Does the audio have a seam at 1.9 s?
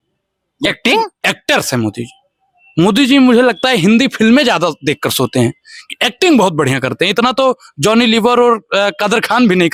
no; 0 cuts

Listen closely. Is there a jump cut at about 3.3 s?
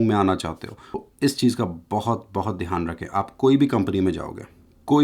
no; 1 cut; at 1.0 s

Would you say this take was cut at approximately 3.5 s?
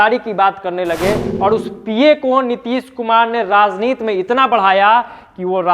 no; 1 cut; at 1.3 s

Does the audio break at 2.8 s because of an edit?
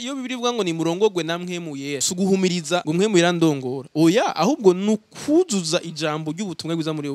yes; 2 cuts; at 2.1 s, 2.8 s

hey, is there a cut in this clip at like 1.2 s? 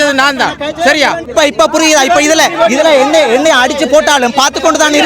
yes; 1 cut; at 1.2 s

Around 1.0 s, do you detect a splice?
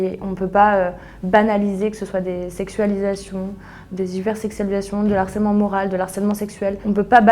no; 0 cuts

